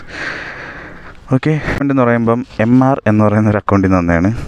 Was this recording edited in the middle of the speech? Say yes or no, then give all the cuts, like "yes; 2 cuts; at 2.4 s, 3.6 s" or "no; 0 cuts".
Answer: yes; 1 cut; at 1.8 s